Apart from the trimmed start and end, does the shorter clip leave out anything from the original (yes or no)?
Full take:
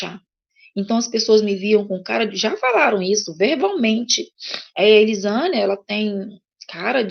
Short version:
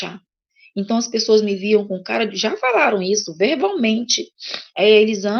no